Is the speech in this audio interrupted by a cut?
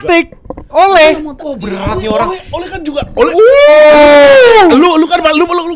no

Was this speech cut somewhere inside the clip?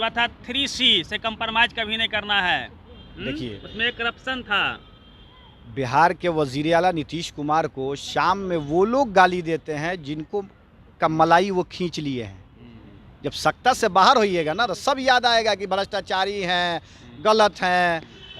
no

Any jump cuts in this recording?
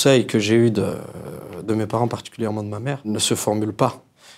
yes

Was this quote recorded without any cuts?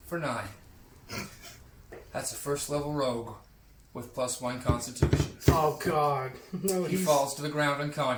yes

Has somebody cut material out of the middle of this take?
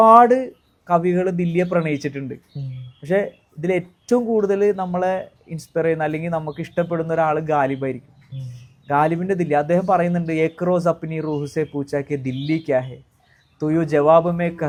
no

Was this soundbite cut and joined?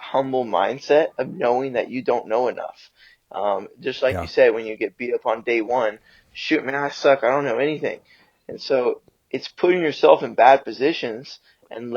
no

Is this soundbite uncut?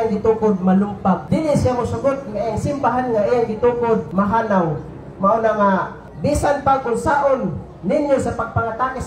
no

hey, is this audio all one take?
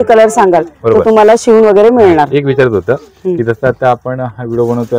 yes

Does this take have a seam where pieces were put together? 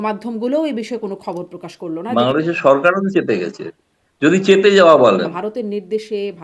yes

